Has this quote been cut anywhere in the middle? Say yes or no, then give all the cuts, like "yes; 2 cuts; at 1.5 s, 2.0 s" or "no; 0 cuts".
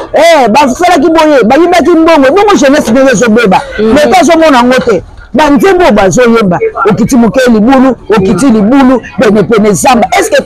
no; 0 cuts